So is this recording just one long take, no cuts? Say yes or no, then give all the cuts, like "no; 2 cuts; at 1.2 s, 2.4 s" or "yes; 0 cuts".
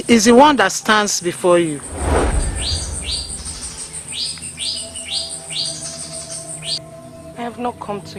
yes; 0 cuts